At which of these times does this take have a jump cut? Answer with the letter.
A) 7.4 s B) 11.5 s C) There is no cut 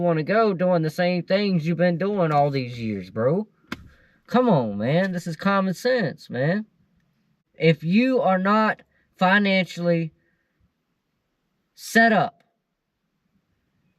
A